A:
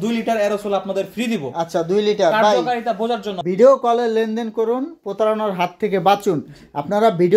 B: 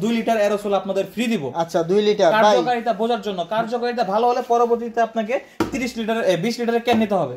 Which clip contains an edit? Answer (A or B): A